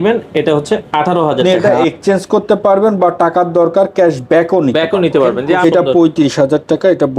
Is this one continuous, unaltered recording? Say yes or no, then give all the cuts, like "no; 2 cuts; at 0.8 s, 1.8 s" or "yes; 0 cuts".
no; 2 cuts; at 1.6 s, 5.5 s